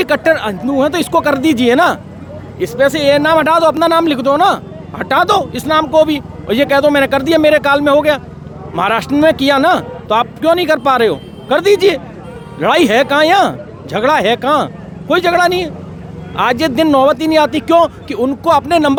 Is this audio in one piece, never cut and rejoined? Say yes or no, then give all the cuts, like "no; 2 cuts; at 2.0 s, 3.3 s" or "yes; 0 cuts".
yes; 0 cuts